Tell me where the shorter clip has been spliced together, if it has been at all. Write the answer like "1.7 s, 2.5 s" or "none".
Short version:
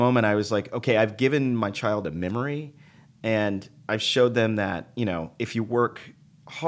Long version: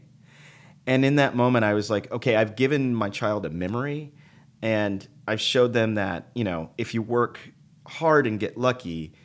none